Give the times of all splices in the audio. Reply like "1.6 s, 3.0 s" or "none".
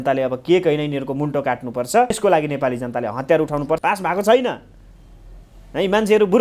2.2 s, 3.8 s